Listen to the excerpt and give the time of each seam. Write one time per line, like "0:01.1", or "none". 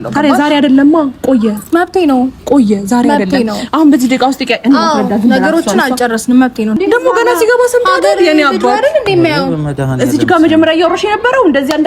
0:06.8